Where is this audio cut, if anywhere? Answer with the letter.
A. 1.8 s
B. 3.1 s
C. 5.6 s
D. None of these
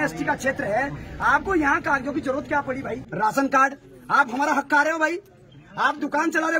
B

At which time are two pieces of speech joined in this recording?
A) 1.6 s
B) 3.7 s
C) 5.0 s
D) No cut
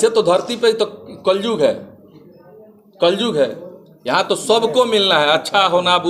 D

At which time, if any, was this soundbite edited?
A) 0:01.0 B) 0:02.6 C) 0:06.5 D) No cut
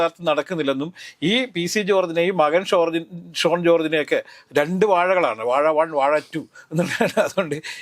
D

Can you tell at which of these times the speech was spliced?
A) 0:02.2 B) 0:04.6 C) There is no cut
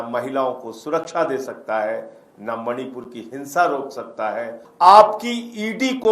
B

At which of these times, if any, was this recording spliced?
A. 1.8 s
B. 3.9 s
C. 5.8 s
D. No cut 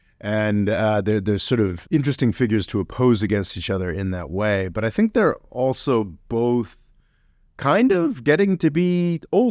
A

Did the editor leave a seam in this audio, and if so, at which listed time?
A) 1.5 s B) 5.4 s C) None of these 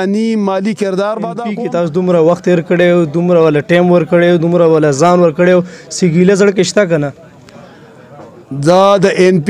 A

